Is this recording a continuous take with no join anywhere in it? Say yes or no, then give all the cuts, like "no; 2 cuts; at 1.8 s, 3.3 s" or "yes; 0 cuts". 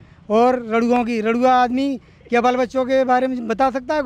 yes; 0 cuts